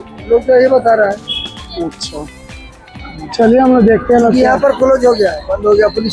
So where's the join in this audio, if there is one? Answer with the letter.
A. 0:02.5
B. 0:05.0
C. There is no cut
C